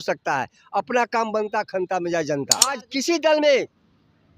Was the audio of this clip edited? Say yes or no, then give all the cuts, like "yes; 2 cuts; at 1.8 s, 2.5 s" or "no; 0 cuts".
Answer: yes; 1 cut; at 2.8 s